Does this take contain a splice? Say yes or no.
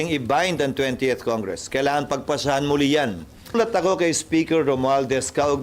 yes